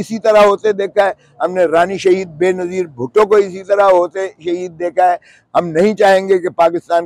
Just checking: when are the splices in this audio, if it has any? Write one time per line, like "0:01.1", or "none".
none